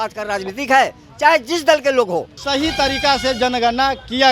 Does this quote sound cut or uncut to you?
cut